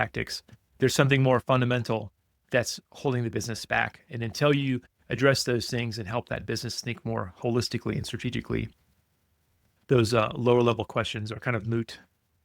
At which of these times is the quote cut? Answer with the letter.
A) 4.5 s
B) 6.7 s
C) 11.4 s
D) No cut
C